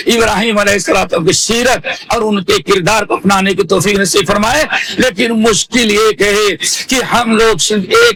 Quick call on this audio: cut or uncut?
uncut